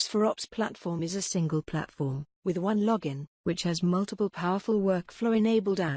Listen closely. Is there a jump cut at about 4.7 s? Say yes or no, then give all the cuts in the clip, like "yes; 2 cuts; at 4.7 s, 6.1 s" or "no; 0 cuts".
no; 1 cut; at 1.0 s